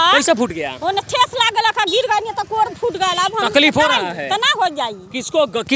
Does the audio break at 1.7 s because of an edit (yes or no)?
no